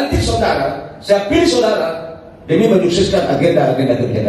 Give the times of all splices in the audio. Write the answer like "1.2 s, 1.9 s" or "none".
none